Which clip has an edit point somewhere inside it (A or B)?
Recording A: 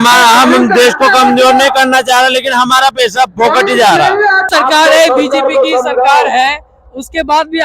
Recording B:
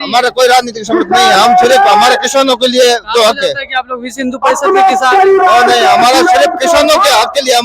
A